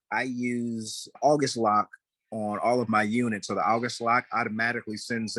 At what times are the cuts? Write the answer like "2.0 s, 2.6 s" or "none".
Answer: 1.2 s